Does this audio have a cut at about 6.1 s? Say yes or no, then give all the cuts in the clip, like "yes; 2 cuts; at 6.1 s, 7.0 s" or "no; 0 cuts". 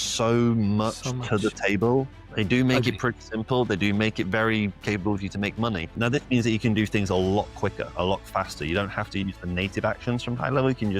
yes; 2 cuts; at 2.2 s, 6.1 s